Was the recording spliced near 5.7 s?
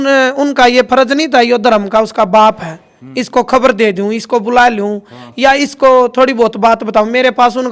no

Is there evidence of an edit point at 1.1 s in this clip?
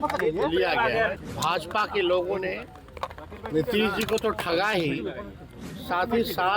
yes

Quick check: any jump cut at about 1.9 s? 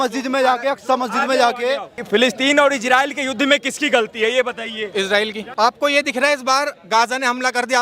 yes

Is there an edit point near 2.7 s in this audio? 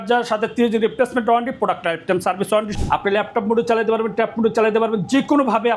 yes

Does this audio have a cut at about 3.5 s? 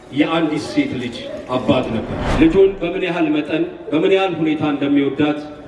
no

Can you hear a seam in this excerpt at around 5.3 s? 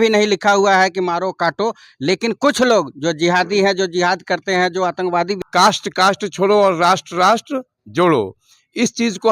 yes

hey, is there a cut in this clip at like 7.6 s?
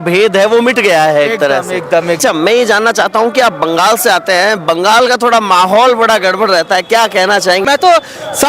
yes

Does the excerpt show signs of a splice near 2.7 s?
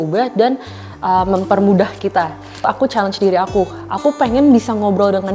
yes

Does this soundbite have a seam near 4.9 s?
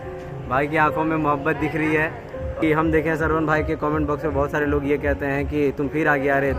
no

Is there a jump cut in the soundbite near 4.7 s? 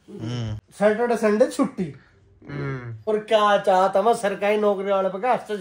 no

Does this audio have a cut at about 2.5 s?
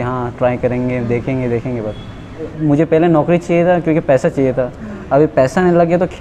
yes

